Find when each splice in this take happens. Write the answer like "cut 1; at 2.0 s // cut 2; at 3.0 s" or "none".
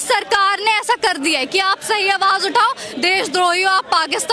none